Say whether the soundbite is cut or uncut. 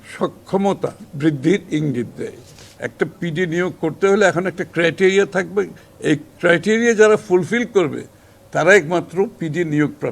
cut